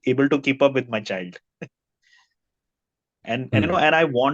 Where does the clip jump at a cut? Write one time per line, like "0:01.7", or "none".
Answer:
0:03.2